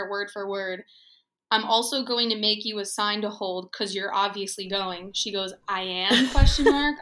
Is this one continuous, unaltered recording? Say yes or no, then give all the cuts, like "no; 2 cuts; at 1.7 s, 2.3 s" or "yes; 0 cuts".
yes; 0 cuts